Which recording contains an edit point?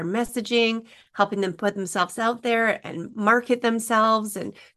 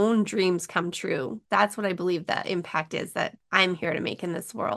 second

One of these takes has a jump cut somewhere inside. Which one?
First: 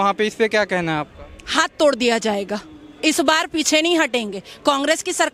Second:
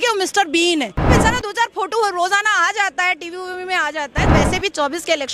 second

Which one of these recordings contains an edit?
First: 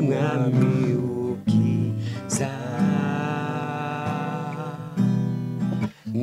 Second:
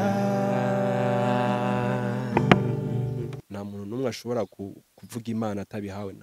second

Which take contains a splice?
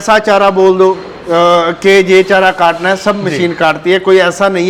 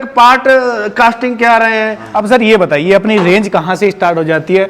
second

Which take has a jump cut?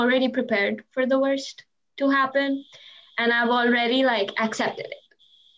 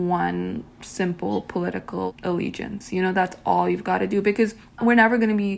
second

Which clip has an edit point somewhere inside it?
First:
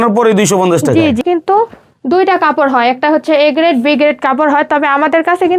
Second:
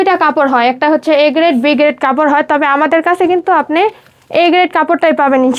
first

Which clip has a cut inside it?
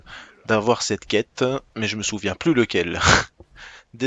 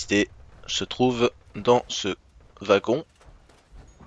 first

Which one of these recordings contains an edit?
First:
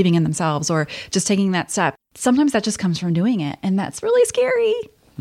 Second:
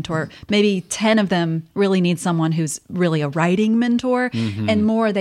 first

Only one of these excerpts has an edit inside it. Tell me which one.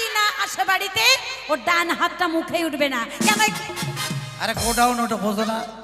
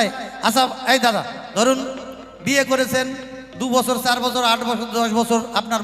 second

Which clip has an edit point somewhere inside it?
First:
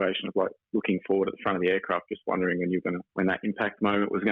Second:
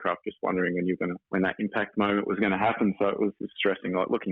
second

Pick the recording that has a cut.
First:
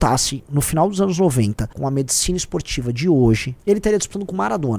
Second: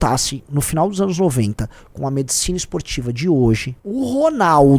first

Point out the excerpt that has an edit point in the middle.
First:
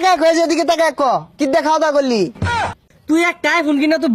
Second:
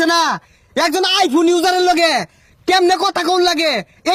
first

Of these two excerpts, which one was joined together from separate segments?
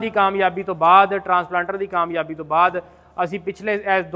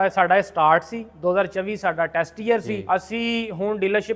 second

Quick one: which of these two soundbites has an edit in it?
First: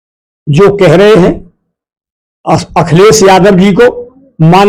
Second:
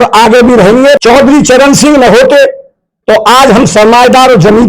second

